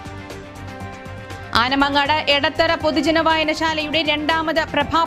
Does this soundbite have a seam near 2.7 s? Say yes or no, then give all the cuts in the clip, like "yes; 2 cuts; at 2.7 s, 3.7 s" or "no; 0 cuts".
no; 1 cut; at 1.2 s